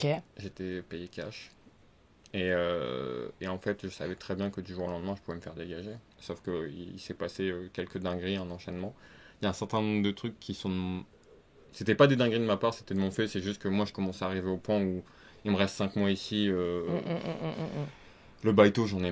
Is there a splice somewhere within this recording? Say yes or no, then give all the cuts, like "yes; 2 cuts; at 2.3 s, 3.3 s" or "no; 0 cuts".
no; 0 cuts